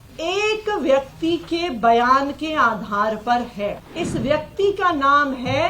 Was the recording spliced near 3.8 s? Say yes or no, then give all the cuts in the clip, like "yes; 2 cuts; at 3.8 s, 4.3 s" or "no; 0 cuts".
yes; 1 cut; at 3.8 s